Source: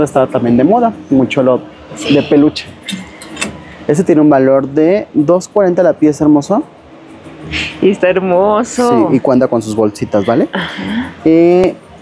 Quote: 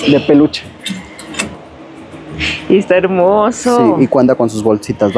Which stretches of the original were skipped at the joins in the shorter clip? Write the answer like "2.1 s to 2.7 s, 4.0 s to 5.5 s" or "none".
3.7 s to 6.8 s

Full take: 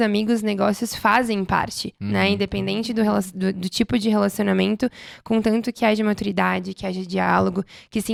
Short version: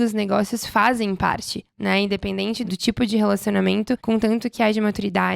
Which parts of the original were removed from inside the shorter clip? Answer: 2.9 s to 3.6 s, 4.9 s to 5.2 s

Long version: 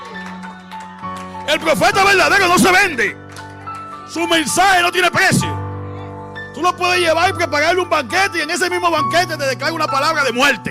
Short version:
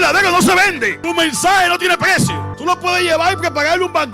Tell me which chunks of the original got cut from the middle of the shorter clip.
3.1 s to 4.1 s, 5.6 s to 6.4 s

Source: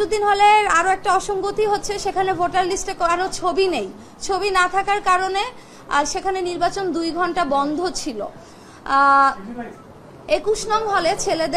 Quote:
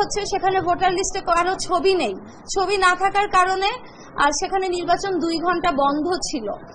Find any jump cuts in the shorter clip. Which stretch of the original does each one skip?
none

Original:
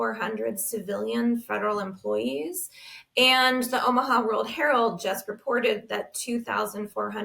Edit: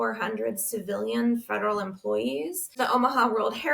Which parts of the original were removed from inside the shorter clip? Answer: 2.7 s to 3.7 s

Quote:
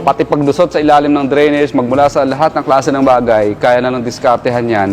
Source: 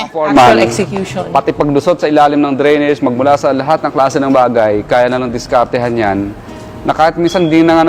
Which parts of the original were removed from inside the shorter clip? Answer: none

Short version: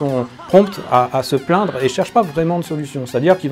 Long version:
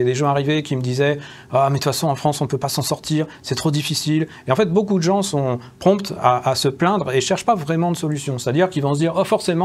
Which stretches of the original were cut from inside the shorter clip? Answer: none

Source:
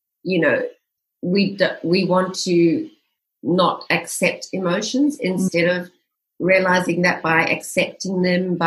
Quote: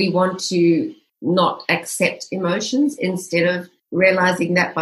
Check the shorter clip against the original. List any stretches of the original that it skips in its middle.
3.0 s to 3.3 s, 6.0 s to 6.2 s

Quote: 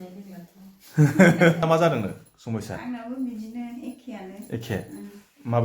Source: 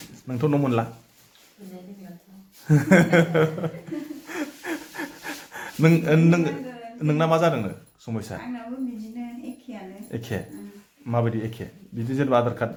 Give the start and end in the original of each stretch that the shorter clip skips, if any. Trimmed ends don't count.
3.3 s to 7.2 s

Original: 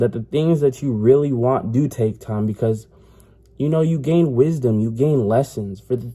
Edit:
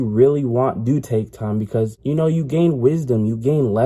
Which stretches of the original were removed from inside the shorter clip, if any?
2.8 s to 3.5 s

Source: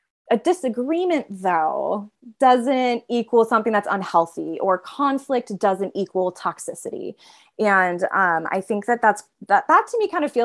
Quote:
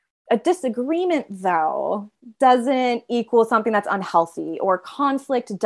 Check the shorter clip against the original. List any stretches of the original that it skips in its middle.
none

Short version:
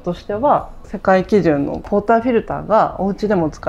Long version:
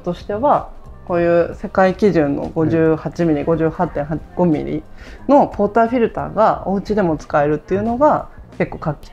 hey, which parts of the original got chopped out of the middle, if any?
0.9 s to 1.6 s, 2.5 s to 5.5 s

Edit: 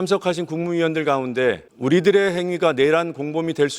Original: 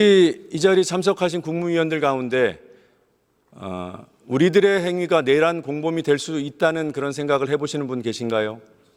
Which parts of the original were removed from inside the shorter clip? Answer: 2.6 s to 4.2 s

